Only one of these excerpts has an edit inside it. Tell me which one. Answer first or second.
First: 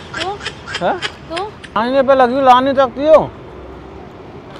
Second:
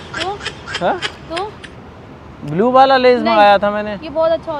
first